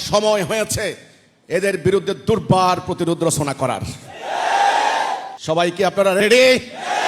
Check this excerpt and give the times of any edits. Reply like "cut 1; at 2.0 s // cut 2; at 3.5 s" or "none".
cut 1; at 5.3 s